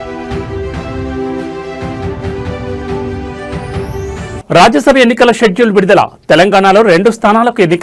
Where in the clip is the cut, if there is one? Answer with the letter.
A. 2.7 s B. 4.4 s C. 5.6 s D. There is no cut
B